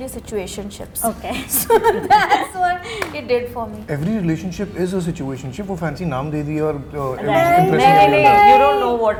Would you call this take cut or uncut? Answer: uncut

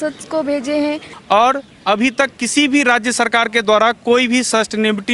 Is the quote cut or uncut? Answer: cut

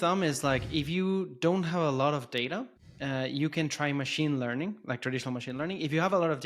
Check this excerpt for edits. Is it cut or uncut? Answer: uncut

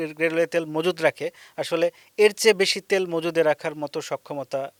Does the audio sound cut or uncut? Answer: uncut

